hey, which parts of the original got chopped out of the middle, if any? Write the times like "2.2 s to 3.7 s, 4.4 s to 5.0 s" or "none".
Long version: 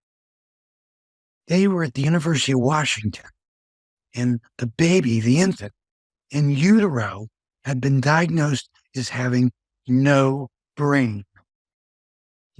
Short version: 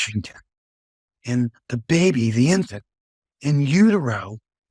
none